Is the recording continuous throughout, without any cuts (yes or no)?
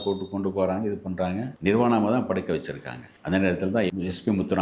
no